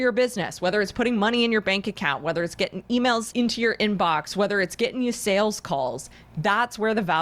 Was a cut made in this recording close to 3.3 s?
yes; 1 cut; at 3.3 s

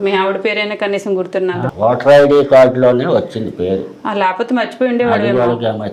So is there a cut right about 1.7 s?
yes; 1 cut; at 1.7 s

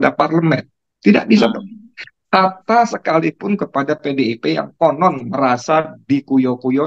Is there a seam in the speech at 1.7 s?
no; 0 cuts

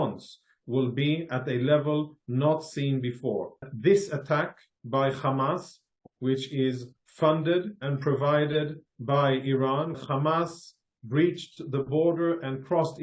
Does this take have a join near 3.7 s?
yes; 2 cuts; at 3.7 s, 10.0 s

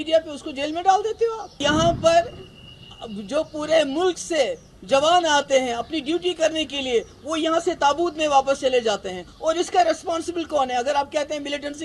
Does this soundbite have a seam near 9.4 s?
no; 1 cut; at 1.6 s

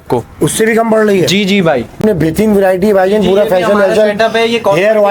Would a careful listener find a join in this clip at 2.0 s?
yes; 1 cut; at 2.0 s

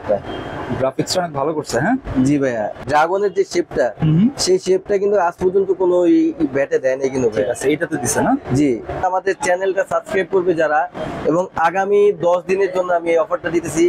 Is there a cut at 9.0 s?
yes; 2 cuts; at 2.8 s, 9.0 s

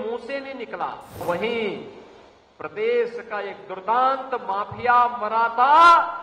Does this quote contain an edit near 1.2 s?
yes; 1 cut; at 1.2 s

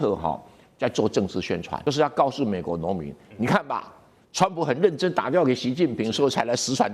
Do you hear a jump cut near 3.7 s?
no; 1 cut; at 1.7 s

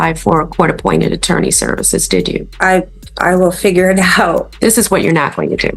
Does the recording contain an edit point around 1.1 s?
no; 2 cuts; at 2.5 s, 4.5 s

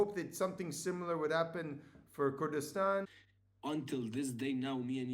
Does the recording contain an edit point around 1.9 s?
no; 1 cut; at 3.2 s

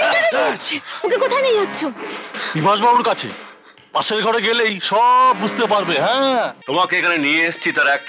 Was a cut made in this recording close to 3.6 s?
no; 1 cut; at 6.6 s

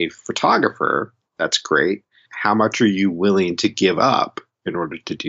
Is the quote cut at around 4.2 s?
no; 2 cuts; at 1.2 s, 2.3 s

